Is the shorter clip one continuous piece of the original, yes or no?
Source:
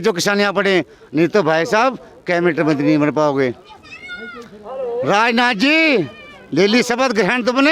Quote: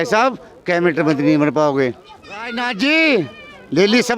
no